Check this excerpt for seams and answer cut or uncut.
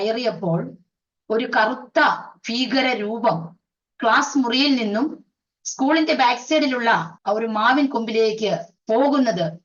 cut